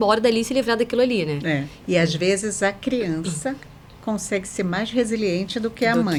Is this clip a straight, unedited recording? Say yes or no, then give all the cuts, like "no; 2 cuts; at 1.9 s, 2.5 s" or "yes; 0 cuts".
yes; 0 cuts